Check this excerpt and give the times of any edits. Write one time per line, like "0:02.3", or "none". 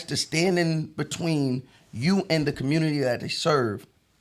none